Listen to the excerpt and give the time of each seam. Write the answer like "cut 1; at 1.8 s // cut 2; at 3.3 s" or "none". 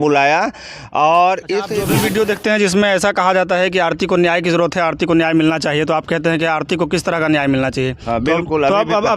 cut 1; at 1.8 s